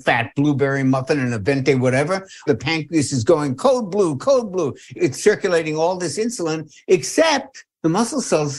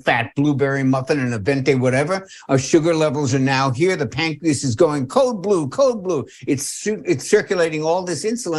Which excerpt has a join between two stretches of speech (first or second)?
first